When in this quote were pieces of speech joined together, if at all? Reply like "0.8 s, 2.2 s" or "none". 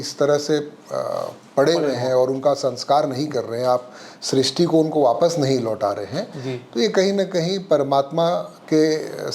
none